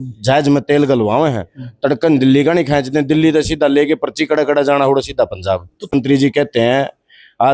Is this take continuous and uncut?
yes; 0 cuts

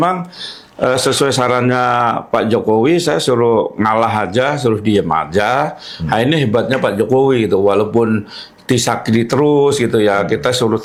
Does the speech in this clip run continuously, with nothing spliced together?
yes; 0 cuts

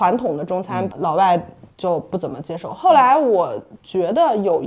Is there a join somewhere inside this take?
no; 0 cuts

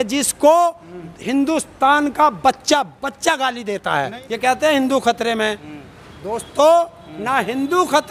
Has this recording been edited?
yes; 1 cut; at 4.2 s

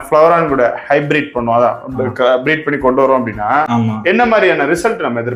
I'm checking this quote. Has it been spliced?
no; 0 cuts

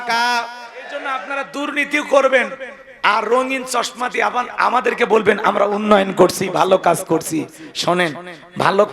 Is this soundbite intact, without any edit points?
no; 1 cut; at 1.2 s

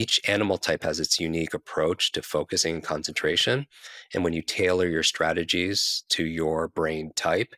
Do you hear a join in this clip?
no; 0 cuts

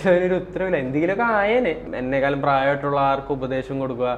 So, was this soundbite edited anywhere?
yes; 1 cut; at 1.8 s

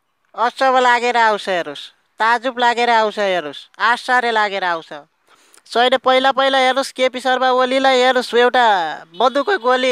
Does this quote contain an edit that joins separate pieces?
no; 0 cuts

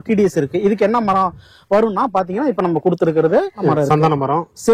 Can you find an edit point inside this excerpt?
yes; 1 cut; at 3.7 s

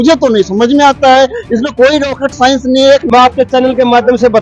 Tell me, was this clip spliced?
yes; 1 cut; at 3.0 s

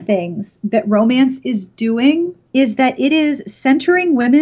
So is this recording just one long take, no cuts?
no; 1 cut; at 2.4 s

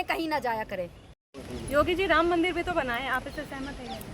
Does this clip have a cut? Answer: no; 0 cuts

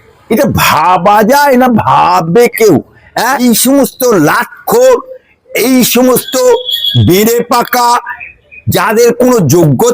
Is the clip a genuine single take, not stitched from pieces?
no; 1 cut; at 3.3 s

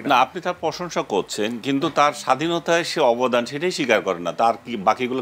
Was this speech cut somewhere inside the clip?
no; 0 cuts

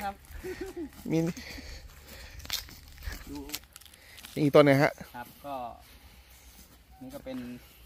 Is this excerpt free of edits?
yes; 0 cuts

